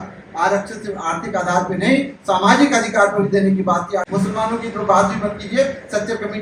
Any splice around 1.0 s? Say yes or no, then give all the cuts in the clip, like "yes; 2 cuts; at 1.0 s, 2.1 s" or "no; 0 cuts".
no; 1 cut; at 4.1 s